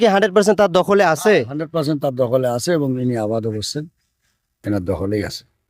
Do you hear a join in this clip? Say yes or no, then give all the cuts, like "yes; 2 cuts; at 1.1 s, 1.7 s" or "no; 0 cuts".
no; 0 cuts